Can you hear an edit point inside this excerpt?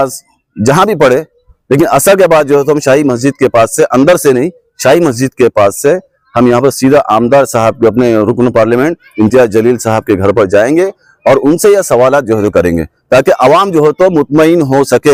no; 0 cuts

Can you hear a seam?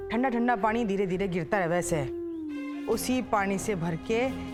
no; 0 cuts

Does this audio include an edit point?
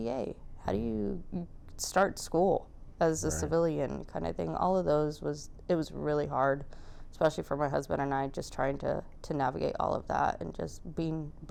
no; 0 cuts

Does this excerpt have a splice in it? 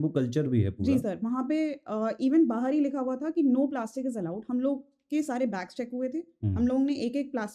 no; 0 cuts

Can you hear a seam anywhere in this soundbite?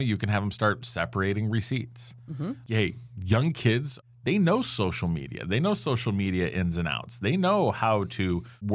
yes; 1 cut; at 3.9 s

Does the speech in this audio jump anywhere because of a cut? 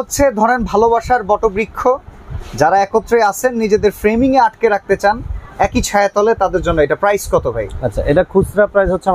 no; 0 cuts

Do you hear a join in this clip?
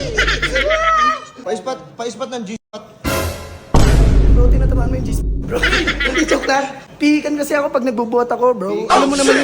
yes; 2 cuts; at 1.4 s, 6.8 s

